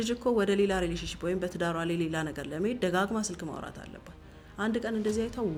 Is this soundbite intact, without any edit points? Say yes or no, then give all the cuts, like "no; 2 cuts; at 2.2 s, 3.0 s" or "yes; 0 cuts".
yes; 0 cuts